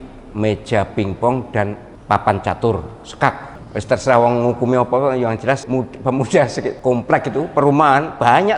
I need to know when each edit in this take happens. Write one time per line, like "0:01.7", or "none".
0:01.9
0:03.5
0:05.6
0:06.7